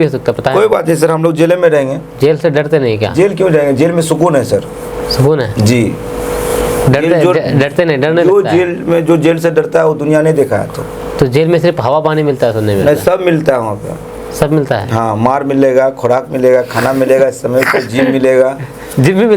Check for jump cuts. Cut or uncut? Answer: uncut